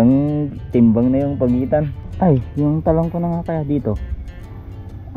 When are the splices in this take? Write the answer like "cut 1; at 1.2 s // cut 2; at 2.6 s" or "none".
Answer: cut 1; at 2.0 s